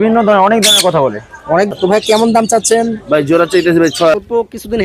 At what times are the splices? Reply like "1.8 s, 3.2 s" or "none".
1.7 s, 4.1 s